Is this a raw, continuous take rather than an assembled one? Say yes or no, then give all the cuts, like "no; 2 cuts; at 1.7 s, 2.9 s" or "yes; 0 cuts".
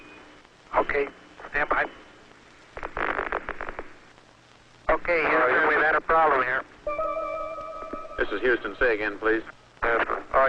no; 1 cut; at 5.3 s